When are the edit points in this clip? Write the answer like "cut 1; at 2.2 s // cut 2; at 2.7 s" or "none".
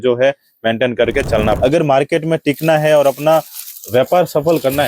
cut 1; at 1.6 s